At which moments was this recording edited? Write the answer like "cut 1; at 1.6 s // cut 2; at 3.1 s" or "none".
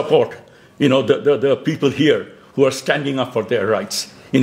none